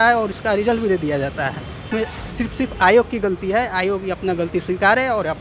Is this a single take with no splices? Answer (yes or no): no